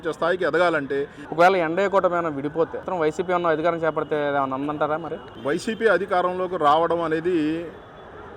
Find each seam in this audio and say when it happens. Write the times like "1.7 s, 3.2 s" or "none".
1.2 s, 2.9 s